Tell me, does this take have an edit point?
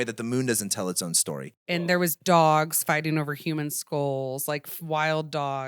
yes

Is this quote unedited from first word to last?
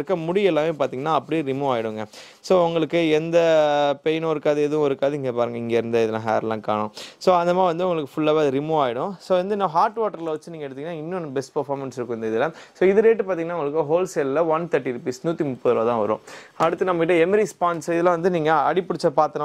yes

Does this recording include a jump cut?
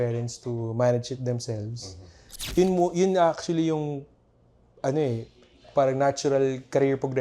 yes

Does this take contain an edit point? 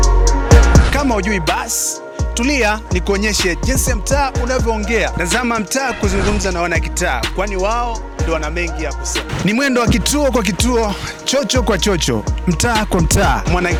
no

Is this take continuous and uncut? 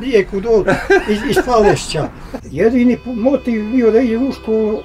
no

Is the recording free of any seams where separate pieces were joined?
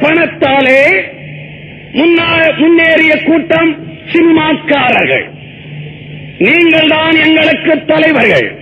yes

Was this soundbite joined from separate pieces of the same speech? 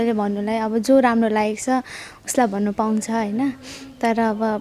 no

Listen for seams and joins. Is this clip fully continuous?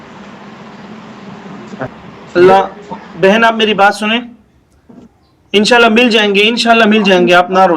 no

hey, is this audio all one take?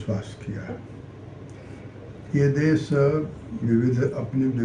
yes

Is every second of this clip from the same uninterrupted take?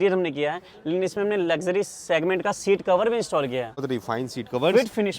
no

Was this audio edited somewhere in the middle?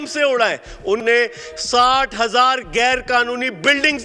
yes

